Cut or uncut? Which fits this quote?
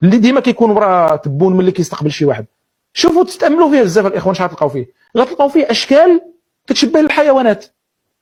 uncut